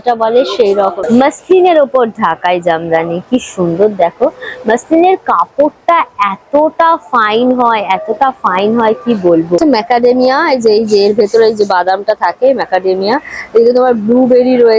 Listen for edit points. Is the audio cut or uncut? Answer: cut